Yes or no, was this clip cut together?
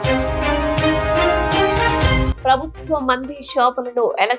yes